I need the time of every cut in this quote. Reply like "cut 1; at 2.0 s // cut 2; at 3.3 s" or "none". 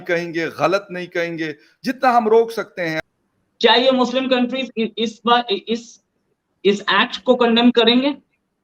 cut 1; at 3.0 s